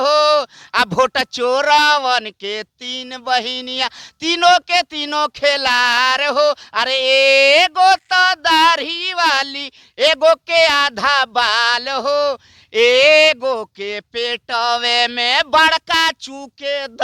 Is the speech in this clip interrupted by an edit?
no; 0 cuts

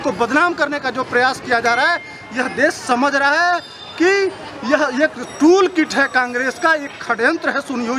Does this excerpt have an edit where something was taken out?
no; 0 cuts

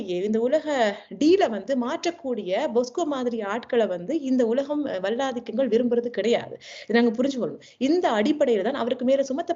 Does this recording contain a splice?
no; 0 cuts

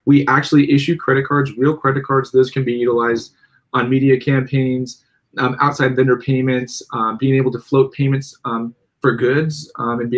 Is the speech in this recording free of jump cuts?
yes; 0 cuts

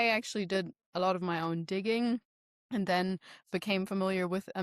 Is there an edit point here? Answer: no; 0 cuts

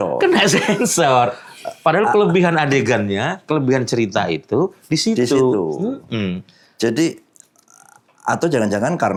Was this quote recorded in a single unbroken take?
yes; 0 cuts

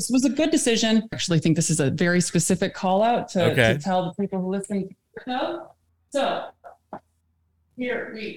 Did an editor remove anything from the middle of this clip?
yes; 1 cut; at 1.2 s

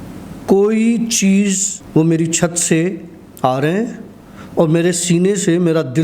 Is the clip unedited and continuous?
no; 1 cut; at 1.7 s

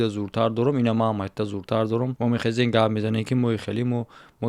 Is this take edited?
yes; 1 cut; at 2.1 s

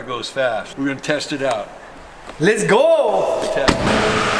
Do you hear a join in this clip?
no; 0 cuts

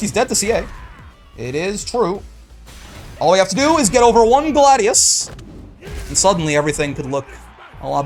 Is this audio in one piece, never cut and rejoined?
yes; 0 cuts

